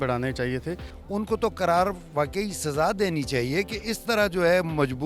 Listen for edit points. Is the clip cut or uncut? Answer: cut